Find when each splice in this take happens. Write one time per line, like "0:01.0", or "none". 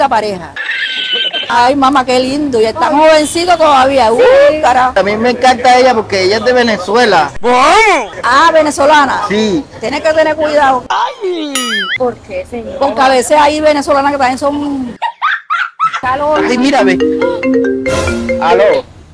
0:01.4
0:04.9
0:16.0